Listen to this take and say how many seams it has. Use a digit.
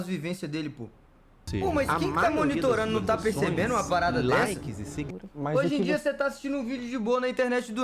2